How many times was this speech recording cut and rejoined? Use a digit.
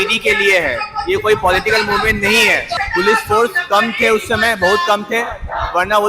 1